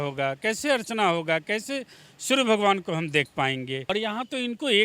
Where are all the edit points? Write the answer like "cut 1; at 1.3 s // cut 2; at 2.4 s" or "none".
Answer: cut 1; at 3.9 s